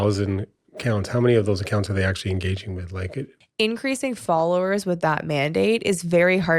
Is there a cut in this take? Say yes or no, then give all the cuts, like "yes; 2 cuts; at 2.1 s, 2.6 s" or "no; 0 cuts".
yes; 1 cut; at 3.4 s